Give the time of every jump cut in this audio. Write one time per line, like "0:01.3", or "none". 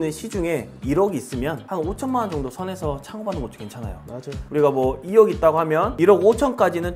none